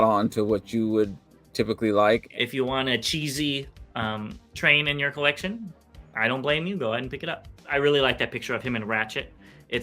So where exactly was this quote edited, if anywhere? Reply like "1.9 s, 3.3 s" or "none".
2.3 s, 7.7 s